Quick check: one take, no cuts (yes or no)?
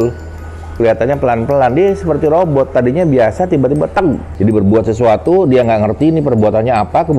no